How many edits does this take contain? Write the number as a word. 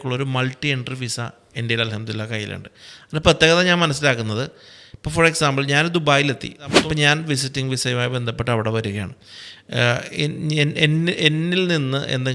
one